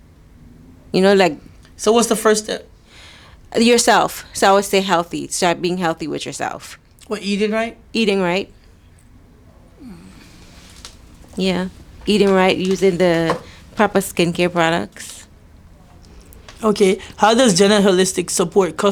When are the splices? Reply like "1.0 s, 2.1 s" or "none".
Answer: none